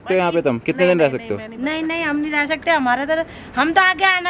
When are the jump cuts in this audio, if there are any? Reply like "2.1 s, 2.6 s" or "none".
none

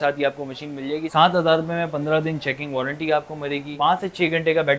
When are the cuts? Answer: 1.1 s, 3.7 s

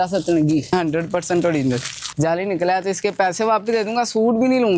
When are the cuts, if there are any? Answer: 0.7 s, 2.0 s

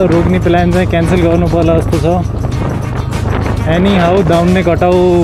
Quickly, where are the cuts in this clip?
none

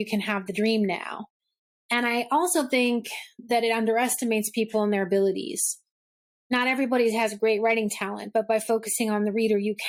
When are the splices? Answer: none

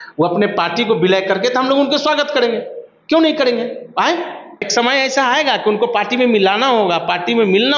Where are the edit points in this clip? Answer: 4.7 s

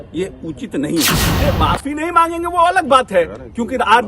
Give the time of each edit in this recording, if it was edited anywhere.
1.3 s

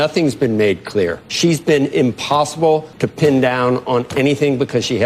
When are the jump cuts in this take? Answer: 1.2 s, 3.0 s

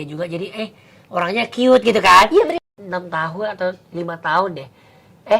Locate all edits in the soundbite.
2.6 s

